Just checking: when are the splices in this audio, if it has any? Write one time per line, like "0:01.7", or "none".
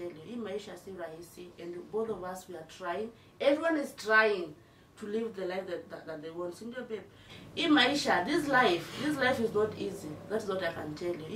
0:07.4